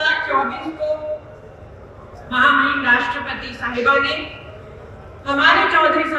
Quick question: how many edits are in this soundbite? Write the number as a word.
zero